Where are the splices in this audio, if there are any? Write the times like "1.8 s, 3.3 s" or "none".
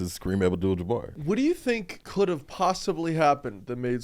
1.2 s, 2.0 s